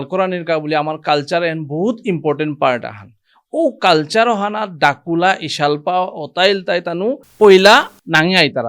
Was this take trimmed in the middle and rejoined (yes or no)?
yes